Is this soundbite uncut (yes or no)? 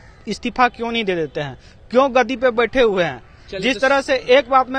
yes